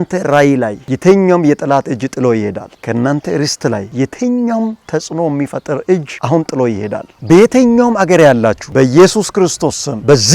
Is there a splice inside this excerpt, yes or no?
yes